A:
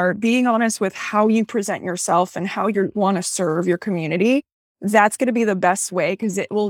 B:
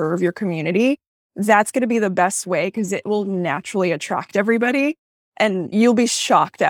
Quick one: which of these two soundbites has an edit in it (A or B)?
B